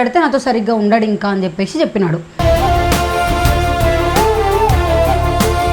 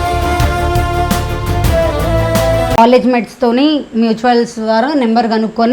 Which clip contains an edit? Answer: second; 1 cut; at 2.8 s

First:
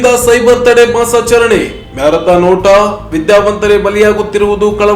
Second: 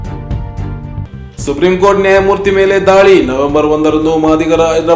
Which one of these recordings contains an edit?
second; 1 cut; at 1.0 s

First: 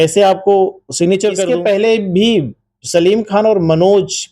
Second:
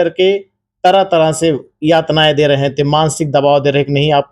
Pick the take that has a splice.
first; 1 cut; at 1.5 s

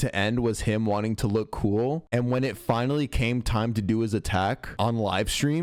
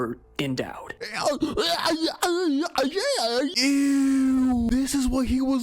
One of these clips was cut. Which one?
second; 2 cuts; at 3.5 s, 4.7 s

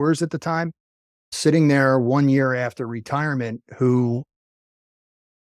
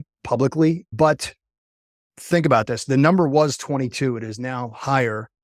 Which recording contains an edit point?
second; 2 cuts; at 0.9 s, 2.0 s

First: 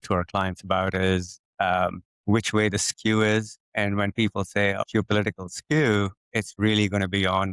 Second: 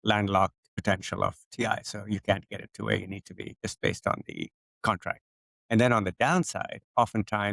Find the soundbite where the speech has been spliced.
first; 4 cuts; at 2.1 s, 3.6 s, 4.8 s, 6.2 s

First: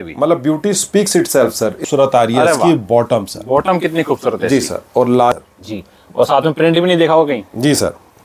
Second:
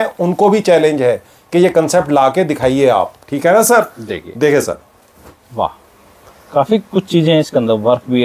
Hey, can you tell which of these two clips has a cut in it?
first; 2 cuts; at 1.8 s, 5.3 s

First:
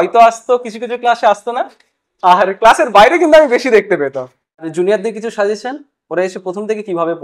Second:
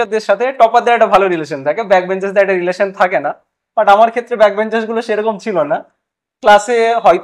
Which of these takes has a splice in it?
first; 1 cut; at 4.7 s

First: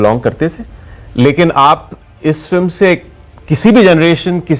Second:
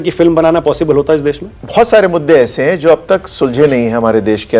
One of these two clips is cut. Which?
second; 1 cut; at 1.5 s

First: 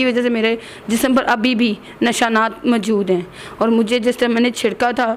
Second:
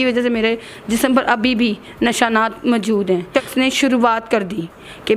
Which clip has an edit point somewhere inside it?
second; 1 cut; at 3.3 s

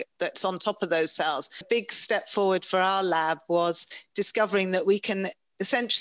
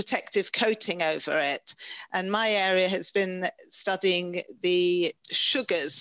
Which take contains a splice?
first; 1 cut; at 1.6 s

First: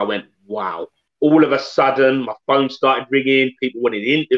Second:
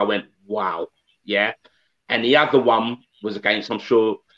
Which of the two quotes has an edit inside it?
first; 1 cut; at 1.0 s

